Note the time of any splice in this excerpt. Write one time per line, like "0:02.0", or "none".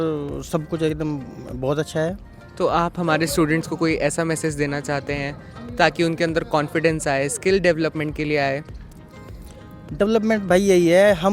none